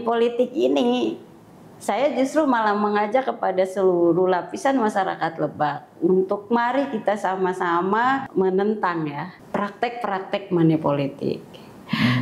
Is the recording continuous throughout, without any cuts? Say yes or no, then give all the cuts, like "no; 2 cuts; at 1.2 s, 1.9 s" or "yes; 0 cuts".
no; 2 cuts; at 8.3 s, 9.3 s